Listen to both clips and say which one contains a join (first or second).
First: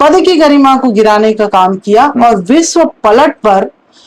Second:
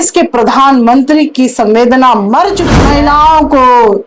second